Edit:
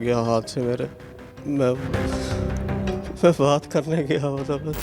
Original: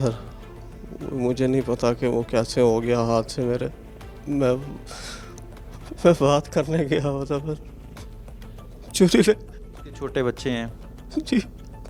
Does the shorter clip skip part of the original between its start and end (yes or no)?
no